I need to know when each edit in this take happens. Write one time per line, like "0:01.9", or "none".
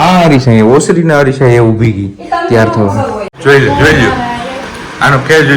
0:03.3